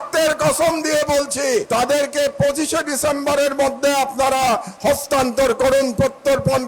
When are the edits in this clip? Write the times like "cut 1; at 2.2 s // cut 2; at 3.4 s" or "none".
cut 1; at 1.7 s